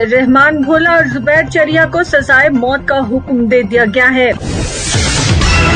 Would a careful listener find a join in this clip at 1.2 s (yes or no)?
no